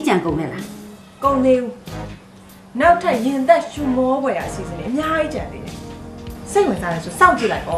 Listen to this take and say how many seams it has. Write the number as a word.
zero